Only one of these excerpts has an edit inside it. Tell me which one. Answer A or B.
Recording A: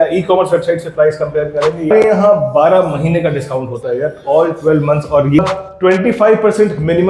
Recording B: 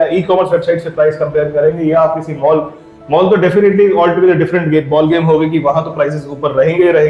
A